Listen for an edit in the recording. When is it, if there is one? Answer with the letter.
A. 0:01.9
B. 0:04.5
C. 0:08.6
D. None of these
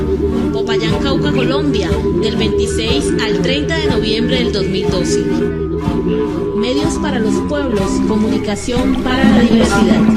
A